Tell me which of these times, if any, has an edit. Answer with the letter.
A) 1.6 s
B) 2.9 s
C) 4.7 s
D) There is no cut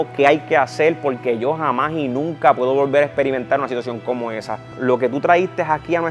C